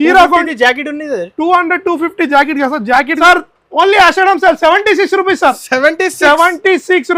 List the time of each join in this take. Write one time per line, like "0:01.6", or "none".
0:03.1